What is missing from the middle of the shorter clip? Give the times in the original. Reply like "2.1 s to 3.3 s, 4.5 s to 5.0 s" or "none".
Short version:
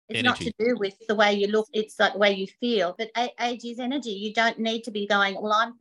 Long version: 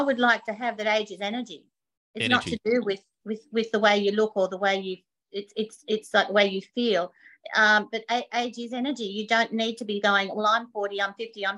3.1 s to 3.7 s, 4.3 s to 5.8 s, 7.2 s to 8.0 s